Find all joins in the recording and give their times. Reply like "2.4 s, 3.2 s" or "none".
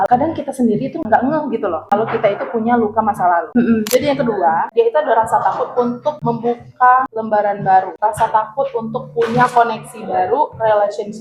3.9 s